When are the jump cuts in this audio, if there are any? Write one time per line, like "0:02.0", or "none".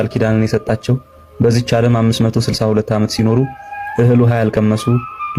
none